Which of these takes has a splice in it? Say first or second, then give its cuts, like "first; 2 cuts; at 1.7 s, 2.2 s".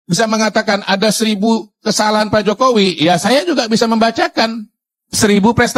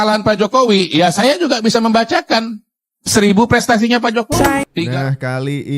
second; 1 cut; at 4.7 s